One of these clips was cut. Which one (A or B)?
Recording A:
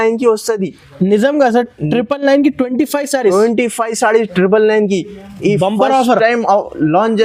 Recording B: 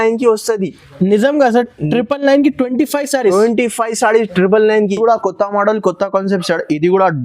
B